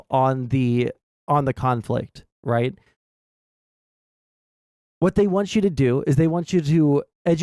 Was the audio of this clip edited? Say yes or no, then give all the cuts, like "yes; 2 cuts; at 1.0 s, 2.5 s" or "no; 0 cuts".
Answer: no; 0 cuts